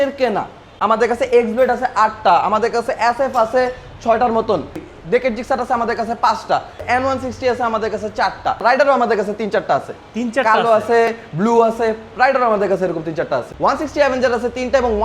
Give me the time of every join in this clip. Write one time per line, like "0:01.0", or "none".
0:01.0
0:04.9
0:06.8
0:08.9
0:13.8